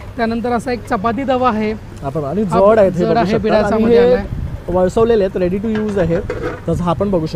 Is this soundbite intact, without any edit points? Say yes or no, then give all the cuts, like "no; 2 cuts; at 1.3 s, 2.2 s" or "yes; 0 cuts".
yes; 0 cuts